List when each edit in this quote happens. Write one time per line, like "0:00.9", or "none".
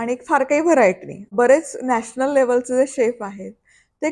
0:01.3